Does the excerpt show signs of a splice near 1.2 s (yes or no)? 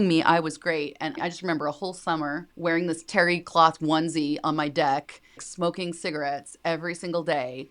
yes